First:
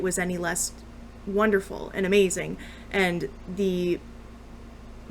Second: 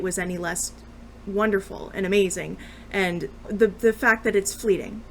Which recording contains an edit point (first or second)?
second